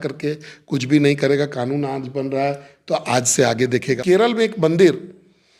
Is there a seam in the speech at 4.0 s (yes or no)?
yes